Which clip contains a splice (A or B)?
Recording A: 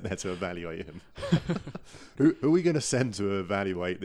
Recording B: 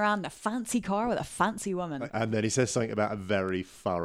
B